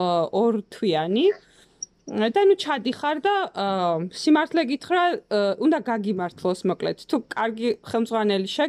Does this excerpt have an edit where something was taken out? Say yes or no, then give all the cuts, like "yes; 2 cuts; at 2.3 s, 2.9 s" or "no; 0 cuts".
no; 0 cuts